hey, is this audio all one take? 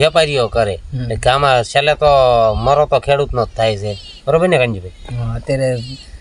yes; 0 cuts

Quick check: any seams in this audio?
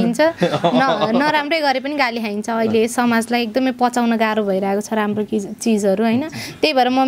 no; 0 cuts

